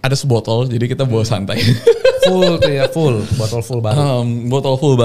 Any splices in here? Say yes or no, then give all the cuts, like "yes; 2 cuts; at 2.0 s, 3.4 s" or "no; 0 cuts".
no; 0 cuts